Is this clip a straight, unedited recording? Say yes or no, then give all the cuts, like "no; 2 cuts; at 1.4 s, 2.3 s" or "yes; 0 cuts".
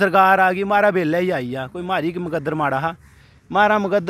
yes; 0 cuts